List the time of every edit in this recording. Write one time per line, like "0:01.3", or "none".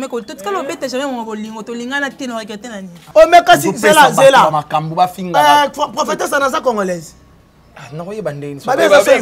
0:03.0